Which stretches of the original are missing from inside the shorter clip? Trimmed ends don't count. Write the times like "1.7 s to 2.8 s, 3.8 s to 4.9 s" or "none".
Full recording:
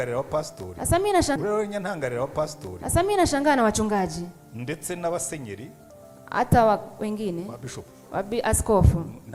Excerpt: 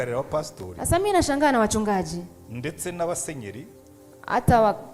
1.0 s to 3.0 s